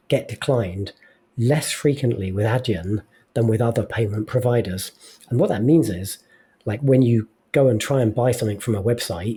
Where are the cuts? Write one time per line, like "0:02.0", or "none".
none